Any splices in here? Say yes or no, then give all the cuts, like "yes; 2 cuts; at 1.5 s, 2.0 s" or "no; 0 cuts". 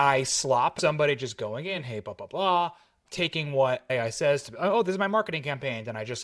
yes; 2 cuts; at 0.8 s, 3.9 s